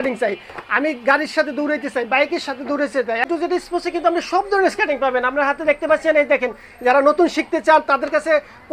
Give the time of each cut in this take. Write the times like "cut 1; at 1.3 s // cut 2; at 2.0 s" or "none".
cut 1; at 3.3 s